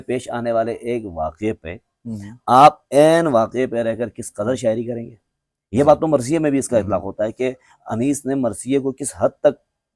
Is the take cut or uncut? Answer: uncut